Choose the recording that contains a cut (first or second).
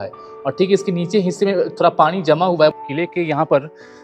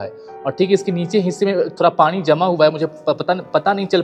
first